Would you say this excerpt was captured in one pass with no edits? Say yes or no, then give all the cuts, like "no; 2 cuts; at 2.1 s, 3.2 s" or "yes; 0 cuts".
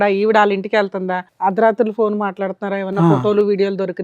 no; 1 cut; at 1.2 s